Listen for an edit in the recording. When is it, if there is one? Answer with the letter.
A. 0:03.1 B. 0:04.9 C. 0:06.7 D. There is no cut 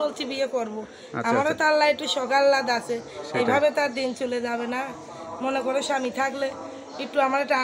D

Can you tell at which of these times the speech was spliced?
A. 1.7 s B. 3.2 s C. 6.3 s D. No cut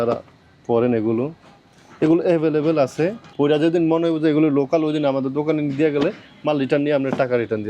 B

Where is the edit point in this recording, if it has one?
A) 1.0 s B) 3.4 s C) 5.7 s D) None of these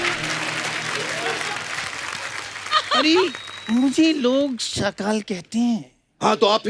D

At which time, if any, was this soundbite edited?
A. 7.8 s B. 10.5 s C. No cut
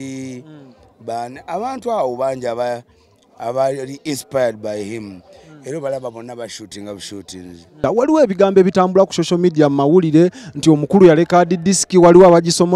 A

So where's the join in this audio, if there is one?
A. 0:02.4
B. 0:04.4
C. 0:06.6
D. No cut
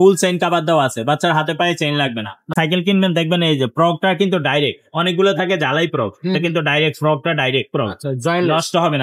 A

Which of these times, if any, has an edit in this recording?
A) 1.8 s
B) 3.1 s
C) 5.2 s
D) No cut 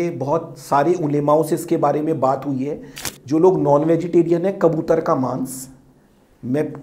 B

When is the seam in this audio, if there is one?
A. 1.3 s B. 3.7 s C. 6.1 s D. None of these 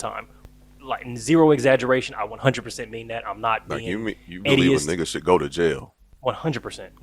D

